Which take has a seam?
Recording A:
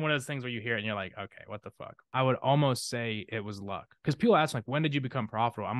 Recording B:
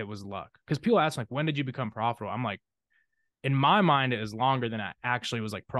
A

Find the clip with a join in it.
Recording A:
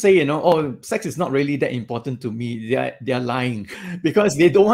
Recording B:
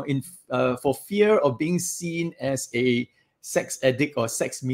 A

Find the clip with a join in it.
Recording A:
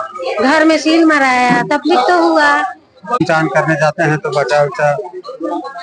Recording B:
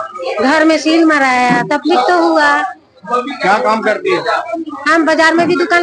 A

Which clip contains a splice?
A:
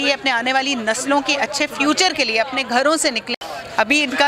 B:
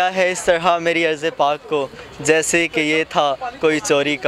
A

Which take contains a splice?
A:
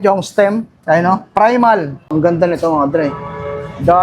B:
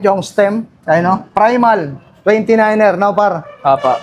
A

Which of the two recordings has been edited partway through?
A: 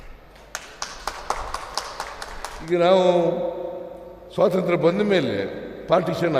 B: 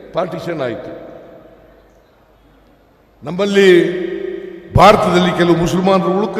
A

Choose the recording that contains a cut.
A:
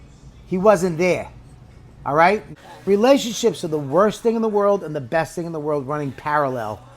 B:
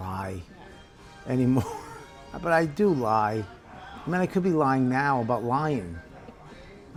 A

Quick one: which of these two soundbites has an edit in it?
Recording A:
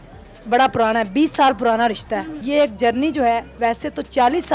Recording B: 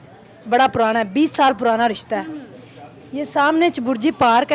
A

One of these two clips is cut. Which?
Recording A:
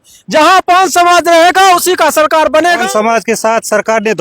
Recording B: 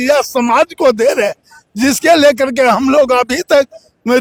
A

